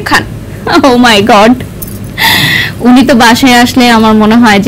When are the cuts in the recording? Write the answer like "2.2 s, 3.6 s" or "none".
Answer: none